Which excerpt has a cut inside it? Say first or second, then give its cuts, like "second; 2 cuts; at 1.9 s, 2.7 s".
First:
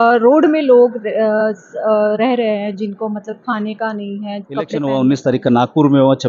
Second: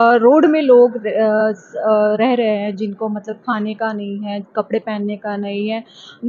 first; 1 cut; at 4.8 s